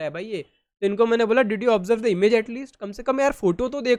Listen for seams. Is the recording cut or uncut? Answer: uncut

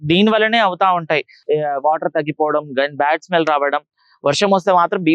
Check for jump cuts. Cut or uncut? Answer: cut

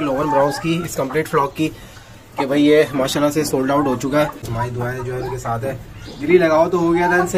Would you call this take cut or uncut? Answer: cut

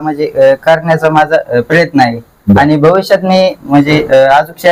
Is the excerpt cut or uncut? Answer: uncut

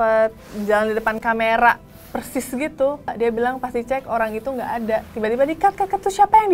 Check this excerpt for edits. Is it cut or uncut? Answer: cut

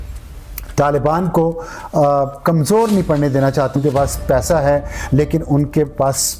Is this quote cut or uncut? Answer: cut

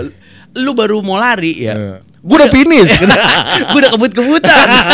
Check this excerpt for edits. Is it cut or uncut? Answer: uncut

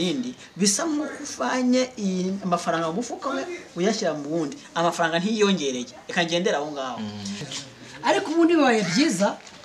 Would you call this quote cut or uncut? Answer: cut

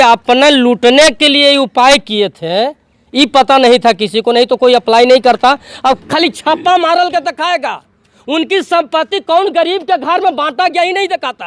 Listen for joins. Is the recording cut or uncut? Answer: cut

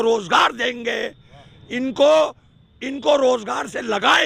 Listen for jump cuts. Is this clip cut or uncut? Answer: uncut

